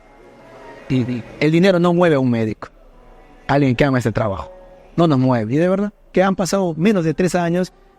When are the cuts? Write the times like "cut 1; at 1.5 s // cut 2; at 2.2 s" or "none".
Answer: cut 1; at 6.1 s